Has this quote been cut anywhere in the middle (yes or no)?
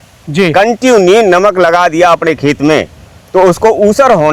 no